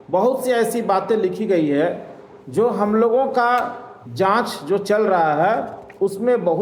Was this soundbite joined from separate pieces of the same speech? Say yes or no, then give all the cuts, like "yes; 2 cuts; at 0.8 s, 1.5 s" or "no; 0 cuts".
no; 0 cuts